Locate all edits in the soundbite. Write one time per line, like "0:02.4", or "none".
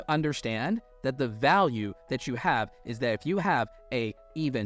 none